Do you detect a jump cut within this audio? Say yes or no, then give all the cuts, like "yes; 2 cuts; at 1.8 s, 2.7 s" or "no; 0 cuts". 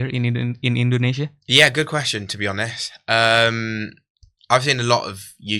no; 0 cuts